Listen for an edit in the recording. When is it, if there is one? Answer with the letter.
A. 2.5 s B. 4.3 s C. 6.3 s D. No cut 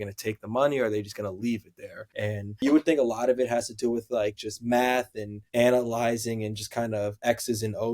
A